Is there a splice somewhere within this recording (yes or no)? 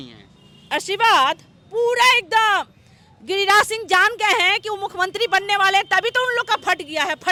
no